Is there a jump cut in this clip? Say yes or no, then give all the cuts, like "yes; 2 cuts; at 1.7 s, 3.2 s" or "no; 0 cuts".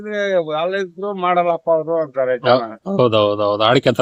no; 0 cuts